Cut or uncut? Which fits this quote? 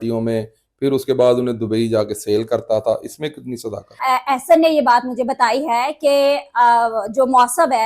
cut